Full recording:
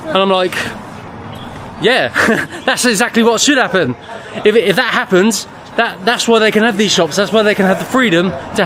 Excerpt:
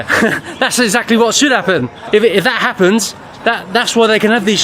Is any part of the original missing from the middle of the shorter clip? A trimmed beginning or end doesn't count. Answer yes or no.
yes